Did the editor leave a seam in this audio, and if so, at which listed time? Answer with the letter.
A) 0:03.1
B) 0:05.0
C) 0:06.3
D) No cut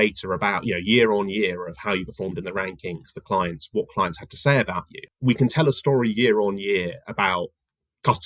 B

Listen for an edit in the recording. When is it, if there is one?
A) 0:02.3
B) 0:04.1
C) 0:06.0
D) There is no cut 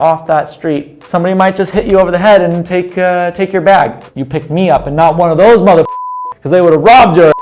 B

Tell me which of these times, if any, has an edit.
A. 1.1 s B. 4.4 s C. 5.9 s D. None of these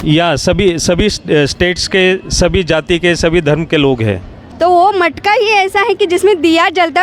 B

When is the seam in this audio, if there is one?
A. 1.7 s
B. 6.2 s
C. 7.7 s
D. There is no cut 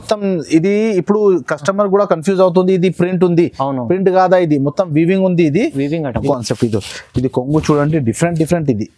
B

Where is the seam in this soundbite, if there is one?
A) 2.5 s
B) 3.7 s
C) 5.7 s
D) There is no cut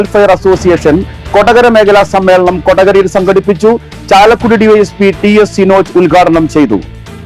D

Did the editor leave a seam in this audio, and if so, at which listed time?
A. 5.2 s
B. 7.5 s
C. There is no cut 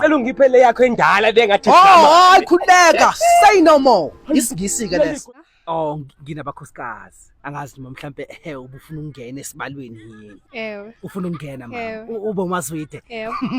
A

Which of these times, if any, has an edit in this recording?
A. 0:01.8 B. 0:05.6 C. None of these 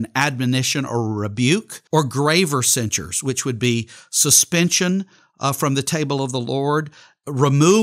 A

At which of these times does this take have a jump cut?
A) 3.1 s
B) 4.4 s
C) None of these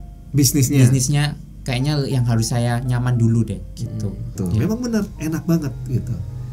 B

